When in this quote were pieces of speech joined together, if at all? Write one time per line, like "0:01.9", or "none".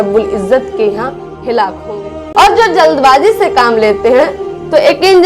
0:02.2